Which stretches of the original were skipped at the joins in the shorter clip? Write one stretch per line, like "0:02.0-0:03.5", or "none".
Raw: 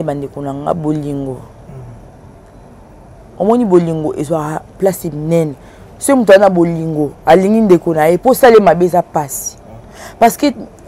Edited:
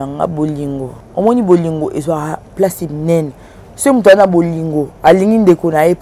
0:01.5-0:03.2